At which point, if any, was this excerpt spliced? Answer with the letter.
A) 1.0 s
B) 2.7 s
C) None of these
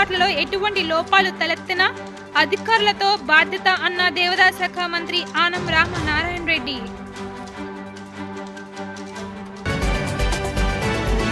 C